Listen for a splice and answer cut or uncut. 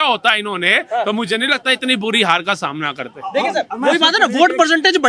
uncut